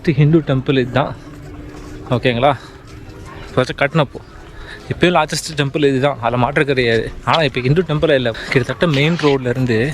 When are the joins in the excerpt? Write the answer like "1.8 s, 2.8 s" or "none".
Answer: 8.4 s